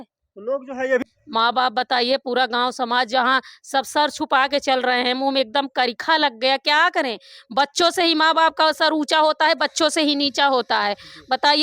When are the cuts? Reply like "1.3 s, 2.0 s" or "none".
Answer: 1.0 s